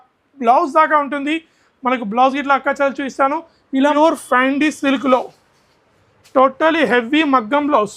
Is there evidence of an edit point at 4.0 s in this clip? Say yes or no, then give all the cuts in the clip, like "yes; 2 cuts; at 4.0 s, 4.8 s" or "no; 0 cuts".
yes; 1 cut; at 4.0 s